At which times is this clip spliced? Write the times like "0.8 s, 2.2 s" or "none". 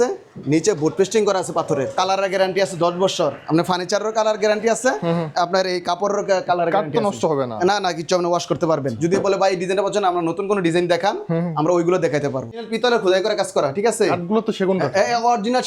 1.9 s, 8.9 s, 12.7 s